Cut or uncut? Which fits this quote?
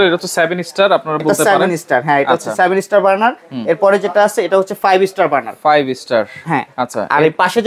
uncut